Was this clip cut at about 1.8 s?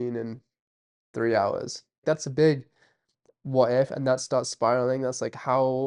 yes; 1 cut; at 1.8 s

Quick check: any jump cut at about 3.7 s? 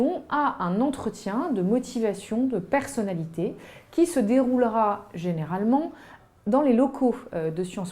yes; 1 cut; at 3.7 s

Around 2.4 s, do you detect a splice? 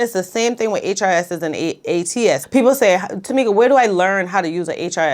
yes; 1 cut; at 2.4 s

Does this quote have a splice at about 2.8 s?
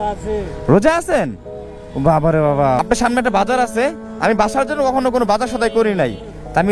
yes; 1 cut; at 2.8 s

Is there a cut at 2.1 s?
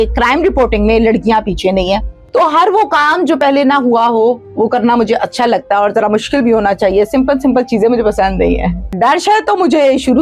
yes; 2 cuts; at 2.1 s, 8.9 s

